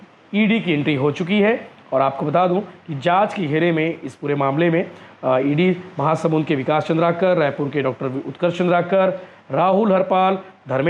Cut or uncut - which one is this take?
uncut